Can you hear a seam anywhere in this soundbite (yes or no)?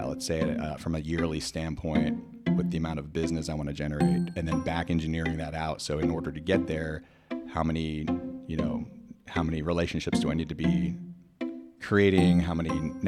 no